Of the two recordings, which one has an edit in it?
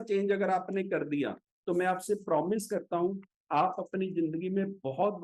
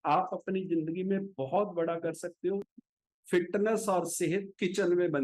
second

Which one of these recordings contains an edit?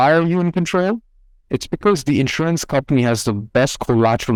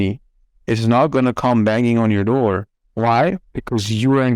second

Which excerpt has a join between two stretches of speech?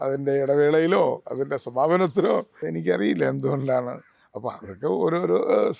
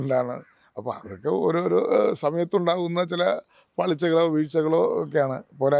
first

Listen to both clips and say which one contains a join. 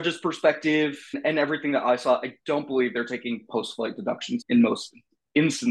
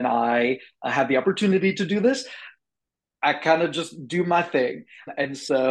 first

